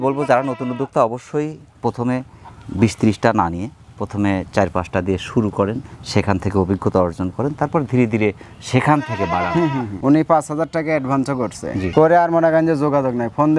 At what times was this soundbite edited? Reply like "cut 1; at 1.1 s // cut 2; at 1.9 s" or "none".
cut 1; at 9.9 s